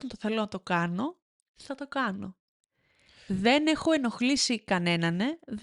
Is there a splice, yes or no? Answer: no